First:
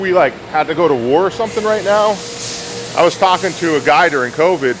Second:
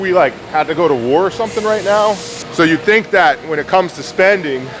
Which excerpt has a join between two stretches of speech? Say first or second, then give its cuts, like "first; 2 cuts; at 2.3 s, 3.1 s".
second; 1 cut; at 2.4 s